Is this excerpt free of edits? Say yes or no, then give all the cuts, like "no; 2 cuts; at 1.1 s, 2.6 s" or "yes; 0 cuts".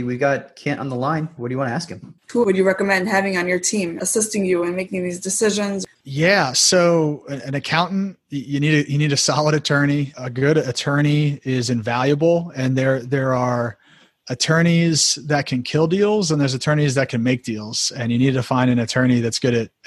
no; 3 cuts; at 2.2 s, 4.0 s, 5.8 s